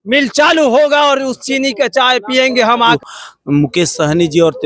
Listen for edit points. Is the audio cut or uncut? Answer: cut